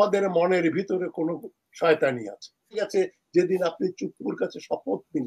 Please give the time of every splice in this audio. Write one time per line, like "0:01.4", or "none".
0:02.8